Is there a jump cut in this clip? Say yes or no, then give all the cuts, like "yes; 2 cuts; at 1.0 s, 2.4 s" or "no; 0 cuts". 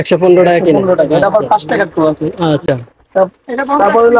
yes; 1 cut; at 2.6 s